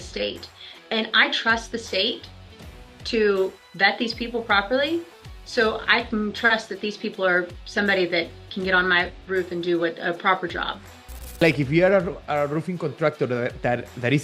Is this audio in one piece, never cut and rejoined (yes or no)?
no